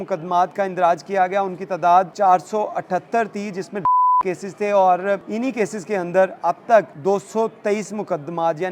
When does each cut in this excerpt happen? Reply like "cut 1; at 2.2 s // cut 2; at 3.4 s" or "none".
cut 1; at 2.1 s // cut 2; at 5.3 s // cut 3; at 6.9 s